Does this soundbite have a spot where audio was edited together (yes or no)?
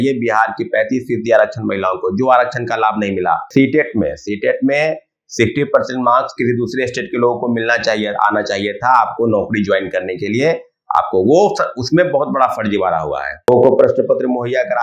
yes